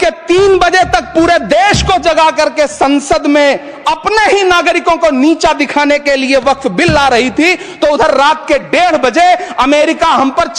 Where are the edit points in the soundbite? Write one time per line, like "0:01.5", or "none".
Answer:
none